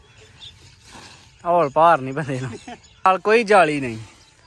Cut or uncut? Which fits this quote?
cut